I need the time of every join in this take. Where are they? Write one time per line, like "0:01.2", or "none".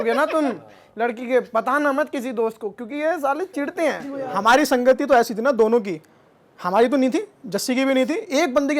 0:04.3